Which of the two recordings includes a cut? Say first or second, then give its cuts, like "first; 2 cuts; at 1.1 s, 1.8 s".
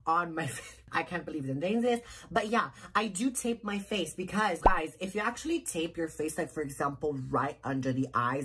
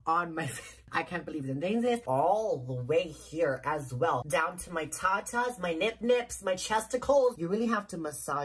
second; 3 cuts; at 2.0 s, 4.2 s, 7.4 s